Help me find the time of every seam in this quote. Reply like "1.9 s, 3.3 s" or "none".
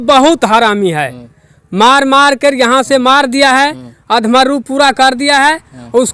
none